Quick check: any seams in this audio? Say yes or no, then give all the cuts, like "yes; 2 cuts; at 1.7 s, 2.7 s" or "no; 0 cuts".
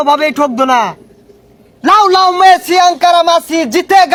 no; 0 cuts